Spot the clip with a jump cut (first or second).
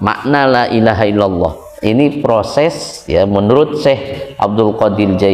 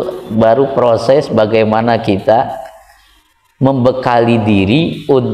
first